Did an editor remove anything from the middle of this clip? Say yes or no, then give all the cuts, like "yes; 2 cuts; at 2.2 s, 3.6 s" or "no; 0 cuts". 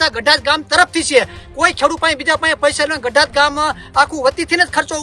no; 0 cuts